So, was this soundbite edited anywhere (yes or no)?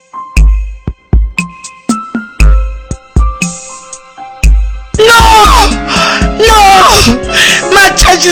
no